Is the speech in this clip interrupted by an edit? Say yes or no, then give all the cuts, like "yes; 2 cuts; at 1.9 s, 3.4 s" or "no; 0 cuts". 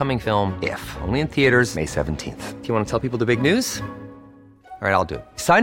no; 0 cuts